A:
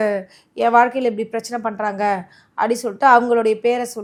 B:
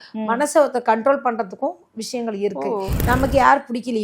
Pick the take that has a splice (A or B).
B